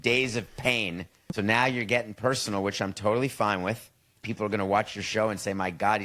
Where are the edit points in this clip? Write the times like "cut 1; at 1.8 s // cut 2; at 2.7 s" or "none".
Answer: cut 1; at 1.4 s // cut 2; at 4.2 s